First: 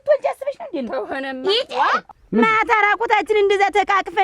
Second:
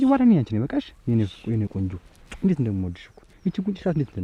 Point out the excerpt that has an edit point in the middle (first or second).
first